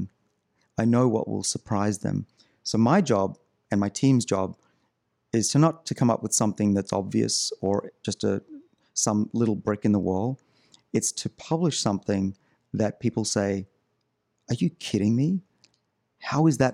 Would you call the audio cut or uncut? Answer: uncut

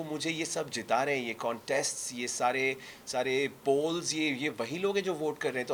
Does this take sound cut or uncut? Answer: uncut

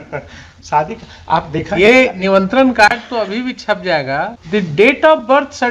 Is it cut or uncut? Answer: cut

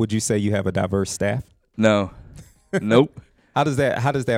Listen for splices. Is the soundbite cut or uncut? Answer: uncut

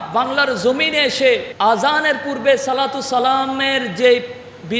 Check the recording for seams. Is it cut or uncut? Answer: cut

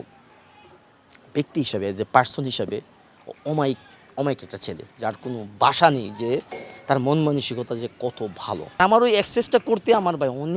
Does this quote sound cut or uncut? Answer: cut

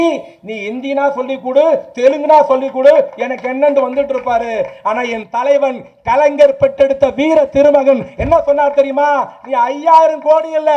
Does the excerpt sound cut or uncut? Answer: uncut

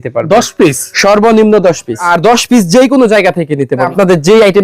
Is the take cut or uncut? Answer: cut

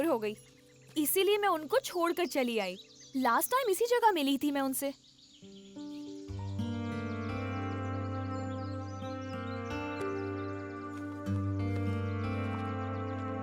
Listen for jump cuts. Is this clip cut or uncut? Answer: cut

